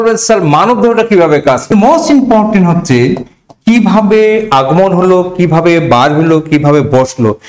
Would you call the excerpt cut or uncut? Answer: cut